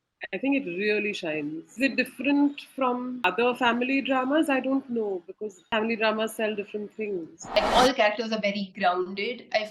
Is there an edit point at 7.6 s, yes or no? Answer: yes